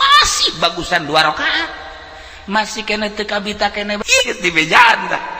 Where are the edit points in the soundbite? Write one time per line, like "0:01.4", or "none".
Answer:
0:04.0